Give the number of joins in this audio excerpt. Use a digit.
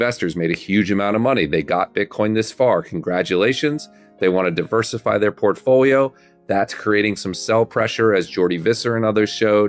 0